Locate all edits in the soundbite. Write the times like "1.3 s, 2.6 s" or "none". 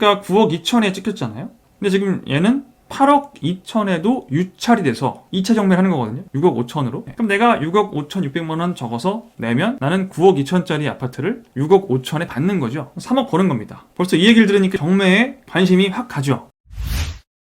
1.6 s, 7.1 s, 13.8 s, 16.5 s